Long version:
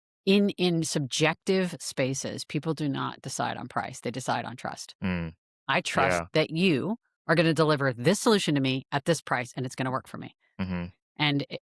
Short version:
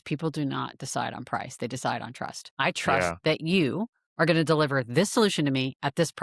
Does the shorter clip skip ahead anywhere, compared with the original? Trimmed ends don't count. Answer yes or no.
yes